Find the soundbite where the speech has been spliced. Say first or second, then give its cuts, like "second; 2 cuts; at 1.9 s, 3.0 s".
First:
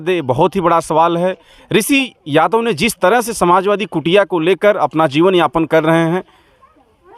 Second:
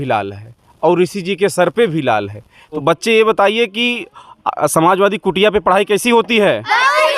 second; 1 cut; at 2.8 s